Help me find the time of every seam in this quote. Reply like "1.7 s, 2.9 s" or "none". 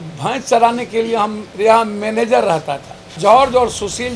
1.4 s, 3.2 s